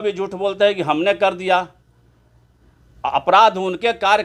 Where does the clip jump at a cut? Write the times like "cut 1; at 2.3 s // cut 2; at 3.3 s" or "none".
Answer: none